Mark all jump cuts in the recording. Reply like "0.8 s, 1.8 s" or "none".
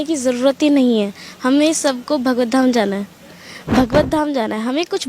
none